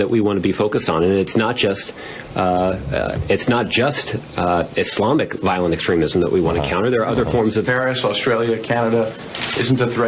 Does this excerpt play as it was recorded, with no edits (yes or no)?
no